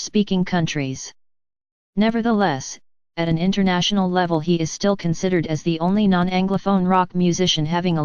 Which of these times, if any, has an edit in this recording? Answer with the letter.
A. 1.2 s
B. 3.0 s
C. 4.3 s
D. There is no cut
C